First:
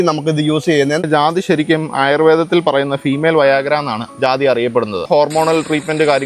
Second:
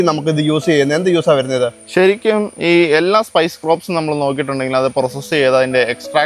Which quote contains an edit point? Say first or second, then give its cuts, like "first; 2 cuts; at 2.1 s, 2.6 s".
first; 3 cuts; at 1.0 s, 4.0 s, 5.1 s